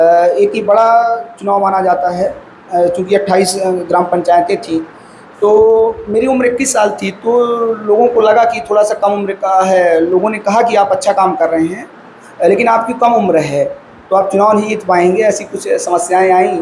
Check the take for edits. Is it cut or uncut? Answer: uncut